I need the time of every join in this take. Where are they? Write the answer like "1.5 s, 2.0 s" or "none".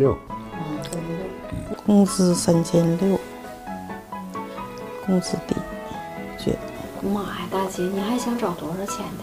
1.6 s